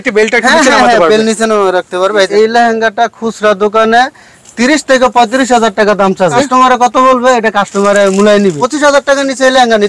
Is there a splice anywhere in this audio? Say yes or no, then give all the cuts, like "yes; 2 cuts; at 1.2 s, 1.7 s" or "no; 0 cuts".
yes; 3 cuts; at 2.3 s, 6.3 s, 8.7 s